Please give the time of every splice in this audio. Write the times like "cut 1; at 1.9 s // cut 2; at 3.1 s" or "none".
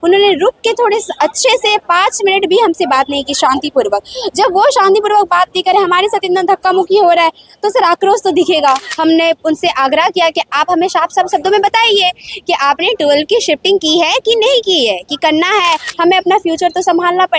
cut 1; at 8.9 s // cut 2; at 15.9 s